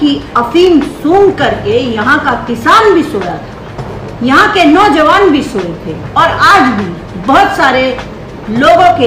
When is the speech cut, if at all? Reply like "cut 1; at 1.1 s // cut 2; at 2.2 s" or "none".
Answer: none